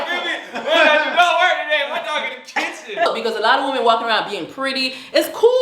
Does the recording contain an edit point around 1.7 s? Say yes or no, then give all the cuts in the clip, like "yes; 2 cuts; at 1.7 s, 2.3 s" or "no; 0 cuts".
no; 1 cut; at 3.1 s